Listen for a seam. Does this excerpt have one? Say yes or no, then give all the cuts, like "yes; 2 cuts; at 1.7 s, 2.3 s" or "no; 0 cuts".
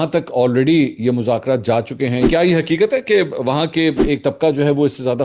yes; 2 cuts; at 2.3 s, 4.1 s